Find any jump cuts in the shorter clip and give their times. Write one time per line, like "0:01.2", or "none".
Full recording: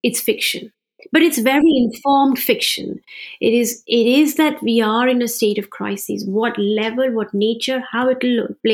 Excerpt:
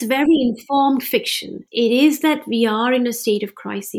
0:01.6